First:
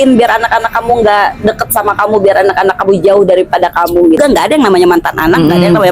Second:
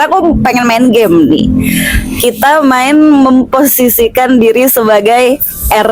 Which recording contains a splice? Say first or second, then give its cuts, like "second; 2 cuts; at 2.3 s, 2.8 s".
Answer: first; 1 cut; at 4.2 s